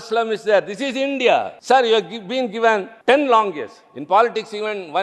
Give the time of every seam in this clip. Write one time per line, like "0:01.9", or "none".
0:01.5
0:02.9

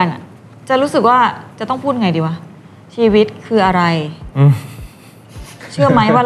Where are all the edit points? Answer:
none

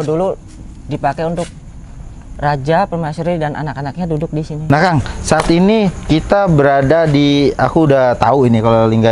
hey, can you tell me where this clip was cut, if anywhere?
0:04.6

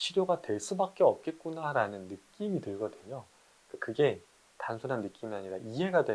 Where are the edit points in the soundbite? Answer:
none

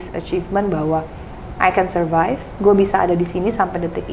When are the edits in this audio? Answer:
0:02.5

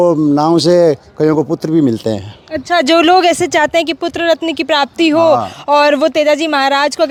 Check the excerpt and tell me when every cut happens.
none

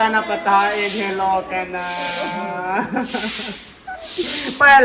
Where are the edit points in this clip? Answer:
none

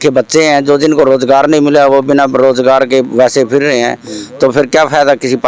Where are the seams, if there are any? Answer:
none

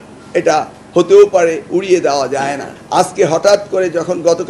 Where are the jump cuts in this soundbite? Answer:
0:02.7

